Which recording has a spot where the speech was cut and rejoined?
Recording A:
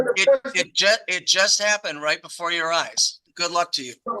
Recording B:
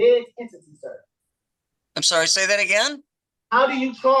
A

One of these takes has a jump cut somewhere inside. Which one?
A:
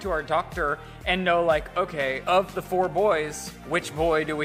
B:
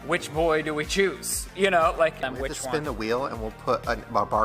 B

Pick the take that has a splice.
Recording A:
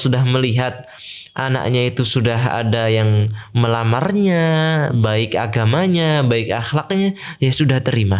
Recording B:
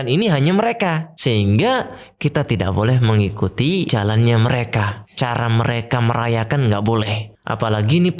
B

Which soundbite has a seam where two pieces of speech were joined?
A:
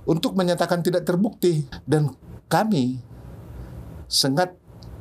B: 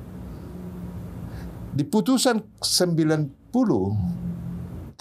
A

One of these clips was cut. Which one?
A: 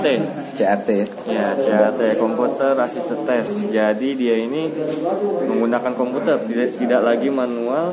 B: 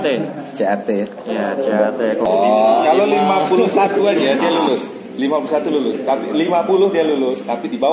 B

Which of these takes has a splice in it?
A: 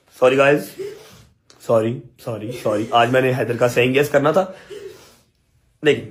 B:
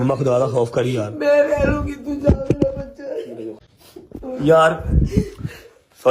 B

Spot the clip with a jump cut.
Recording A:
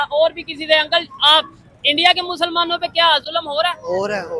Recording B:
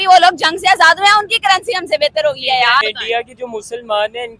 B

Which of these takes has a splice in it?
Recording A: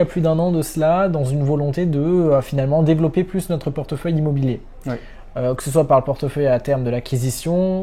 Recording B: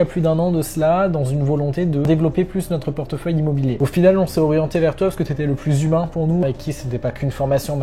B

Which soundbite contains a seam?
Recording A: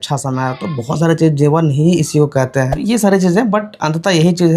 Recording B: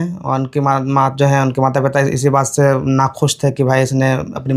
A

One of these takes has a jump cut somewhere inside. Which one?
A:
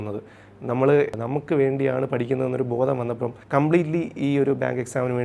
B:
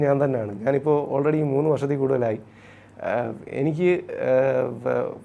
A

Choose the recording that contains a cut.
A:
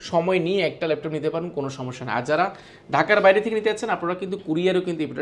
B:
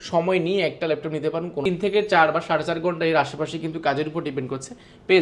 B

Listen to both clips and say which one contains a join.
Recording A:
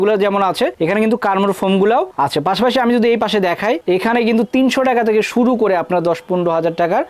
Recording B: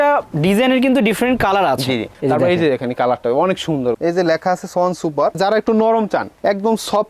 B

